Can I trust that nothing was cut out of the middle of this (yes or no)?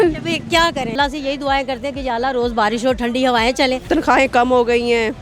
no